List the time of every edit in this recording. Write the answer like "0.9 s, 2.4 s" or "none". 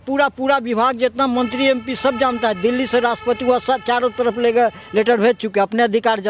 none